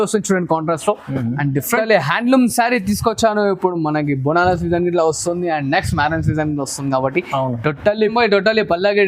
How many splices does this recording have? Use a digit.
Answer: 2